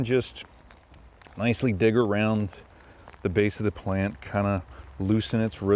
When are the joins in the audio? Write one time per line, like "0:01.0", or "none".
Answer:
none